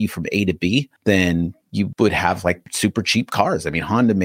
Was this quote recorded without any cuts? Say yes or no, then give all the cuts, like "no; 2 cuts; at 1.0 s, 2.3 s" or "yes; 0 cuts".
yes; 0 cuts